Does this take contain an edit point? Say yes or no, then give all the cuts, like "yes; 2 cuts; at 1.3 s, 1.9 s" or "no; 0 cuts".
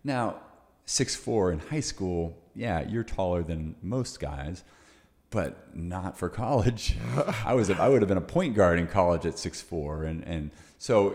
no; 0 cuts